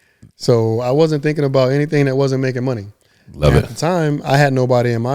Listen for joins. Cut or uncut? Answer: uncut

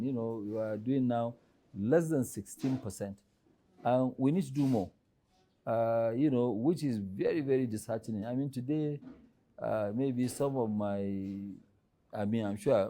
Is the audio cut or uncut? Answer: uncut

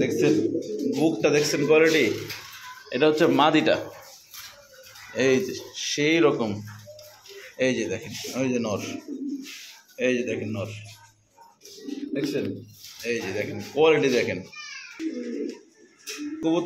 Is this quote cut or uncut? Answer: cut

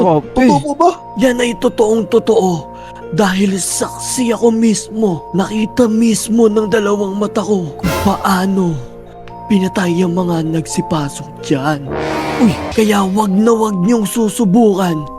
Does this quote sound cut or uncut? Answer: cut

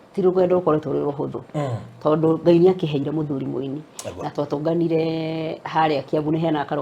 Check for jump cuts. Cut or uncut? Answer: uncut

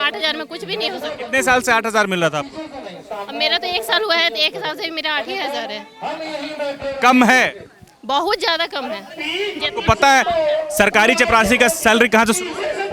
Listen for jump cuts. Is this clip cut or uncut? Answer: uncut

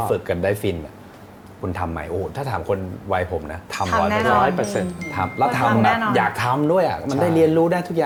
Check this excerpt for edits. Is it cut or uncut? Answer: uncut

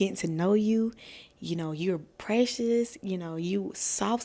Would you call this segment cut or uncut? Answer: uncut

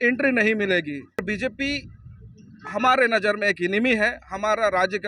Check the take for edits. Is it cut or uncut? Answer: cut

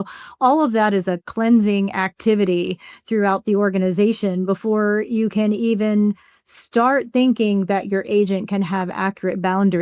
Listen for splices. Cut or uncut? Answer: uncut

